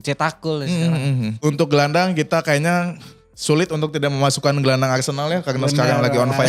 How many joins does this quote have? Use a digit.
1